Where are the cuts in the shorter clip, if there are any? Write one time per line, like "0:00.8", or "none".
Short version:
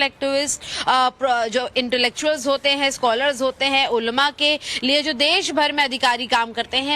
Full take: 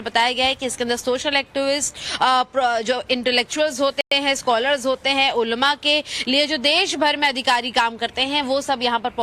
0:02.7

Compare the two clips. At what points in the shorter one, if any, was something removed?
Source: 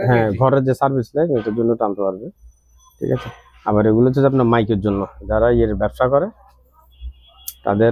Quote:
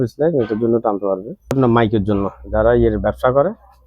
0:01.5

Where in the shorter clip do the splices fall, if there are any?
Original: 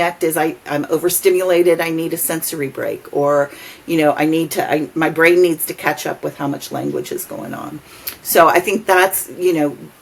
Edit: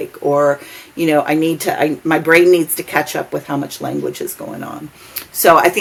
none

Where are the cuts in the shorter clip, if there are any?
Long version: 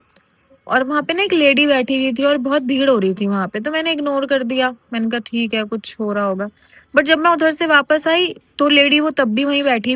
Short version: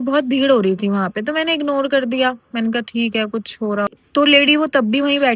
0:03.9

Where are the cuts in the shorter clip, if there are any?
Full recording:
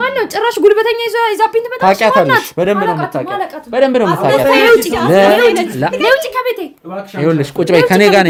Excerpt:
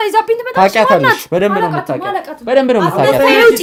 none

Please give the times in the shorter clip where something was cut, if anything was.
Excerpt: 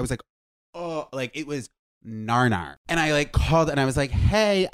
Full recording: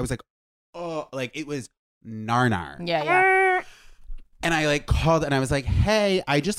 0:02.7

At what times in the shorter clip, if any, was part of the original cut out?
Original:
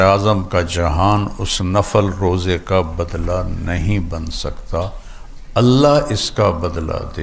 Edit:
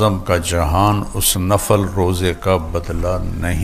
none

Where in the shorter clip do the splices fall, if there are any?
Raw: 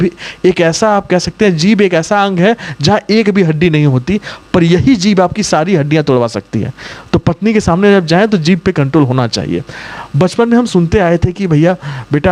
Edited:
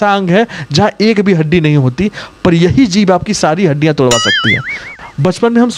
0:04.8

